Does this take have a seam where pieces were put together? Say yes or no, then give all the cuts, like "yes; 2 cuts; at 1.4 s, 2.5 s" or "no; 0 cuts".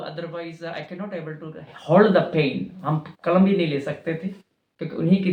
no; 0 cuts